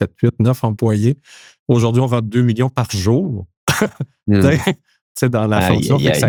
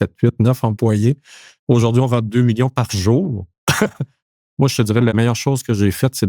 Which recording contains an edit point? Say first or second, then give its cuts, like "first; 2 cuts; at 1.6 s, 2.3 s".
second; 2 cuts; at 4.1 s, 5.1 s